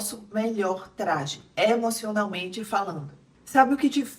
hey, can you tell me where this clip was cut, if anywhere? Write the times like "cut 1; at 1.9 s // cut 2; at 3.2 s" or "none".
cut 1; at 3.3 s